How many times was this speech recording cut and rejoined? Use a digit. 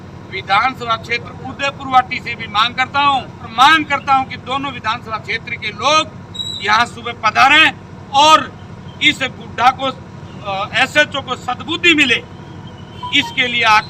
1